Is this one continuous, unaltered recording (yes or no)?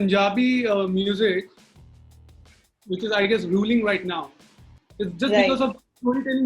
yes